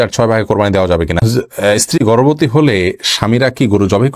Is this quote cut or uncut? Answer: cut